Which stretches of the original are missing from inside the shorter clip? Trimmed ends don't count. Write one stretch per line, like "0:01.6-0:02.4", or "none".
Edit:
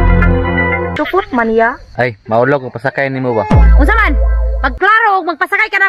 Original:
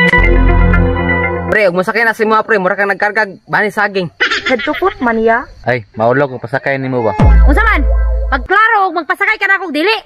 0:01.4-0:04.6